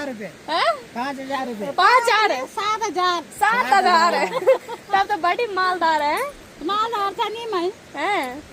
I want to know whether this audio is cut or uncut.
uncut